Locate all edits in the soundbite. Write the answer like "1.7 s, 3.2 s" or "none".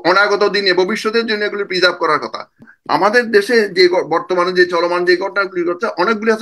2.7 s